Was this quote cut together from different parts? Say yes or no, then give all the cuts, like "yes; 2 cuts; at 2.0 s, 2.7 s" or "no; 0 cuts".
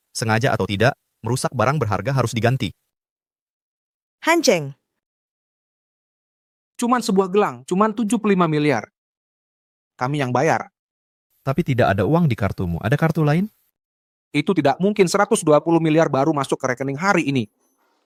no; 0 cuts